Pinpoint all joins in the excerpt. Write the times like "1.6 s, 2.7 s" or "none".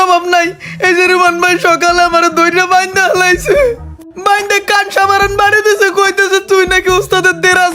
none